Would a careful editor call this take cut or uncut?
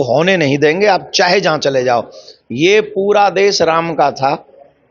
uncut